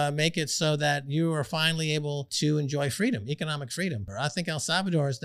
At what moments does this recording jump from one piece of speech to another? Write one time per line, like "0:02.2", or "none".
0:02.3
0:04.1